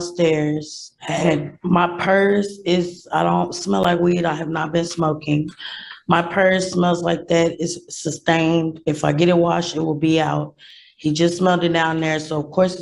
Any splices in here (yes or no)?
no